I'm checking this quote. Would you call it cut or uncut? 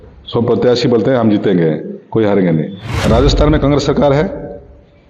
cut